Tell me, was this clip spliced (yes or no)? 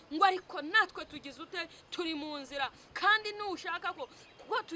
no